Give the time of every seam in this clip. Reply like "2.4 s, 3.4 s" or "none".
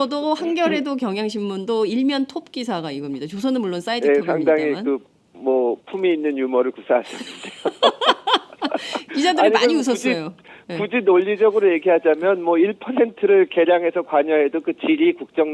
none